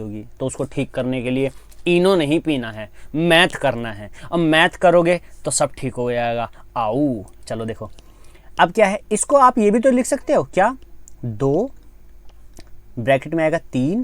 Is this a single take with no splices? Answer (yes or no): yes